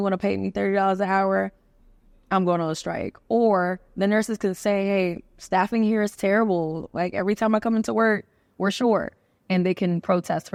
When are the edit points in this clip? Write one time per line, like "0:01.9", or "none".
none